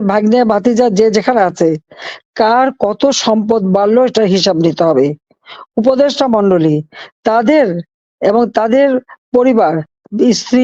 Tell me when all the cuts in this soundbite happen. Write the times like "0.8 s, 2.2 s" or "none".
none

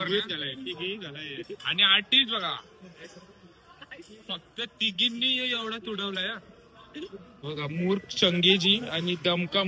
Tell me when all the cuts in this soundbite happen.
7.4 s

